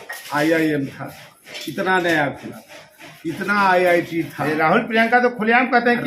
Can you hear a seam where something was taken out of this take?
no; 0 cuts

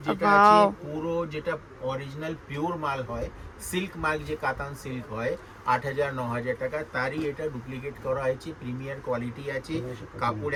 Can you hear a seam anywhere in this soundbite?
no; 0 cuts

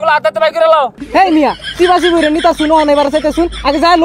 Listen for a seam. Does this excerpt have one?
yes; 1 cut; at 1.0 s

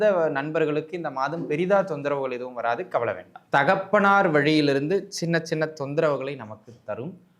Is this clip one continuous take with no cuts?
no; 1 cut; at 3.3 s

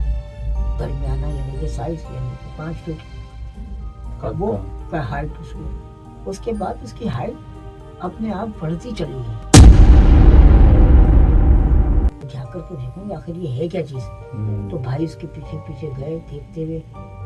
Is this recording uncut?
no; 1 cut; at 12.2 s

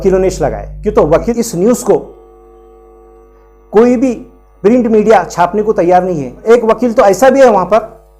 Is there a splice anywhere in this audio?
yes; 2 cuts; at 1.2 s, 6.4 s

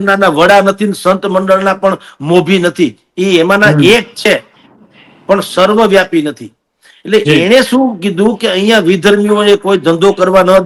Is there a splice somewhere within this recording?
no; 0 cuts

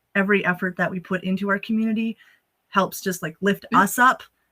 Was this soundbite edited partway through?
no; 0 cuts

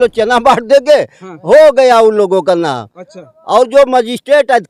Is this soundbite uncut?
yes; 0 cuts

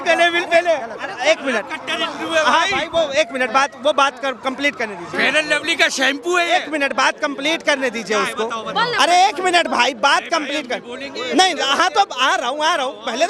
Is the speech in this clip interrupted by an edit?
no; 0 cuts

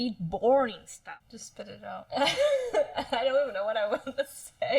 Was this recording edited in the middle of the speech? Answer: yes; 1 cut; at 1.1 s

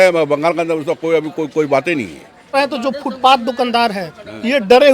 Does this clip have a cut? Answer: yes; 1 cut; at 2.5 s

